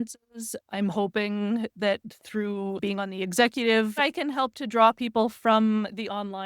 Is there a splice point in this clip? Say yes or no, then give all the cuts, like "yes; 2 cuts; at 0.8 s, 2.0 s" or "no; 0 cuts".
yes; 2 cuts; at 2.8 s, 4.0 s